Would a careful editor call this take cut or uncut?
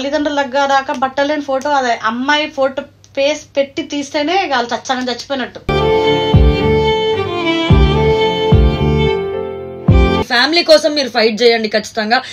cut